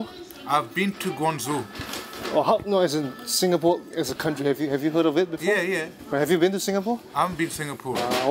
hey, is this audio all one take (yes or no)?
yes